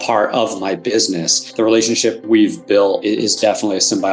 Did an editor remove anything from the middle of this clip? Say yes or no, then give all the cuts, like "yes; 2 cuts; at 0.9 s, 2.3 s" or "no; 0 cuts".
yes; 3 cuts; at 1.4 s, 2.2 s, 3.0 s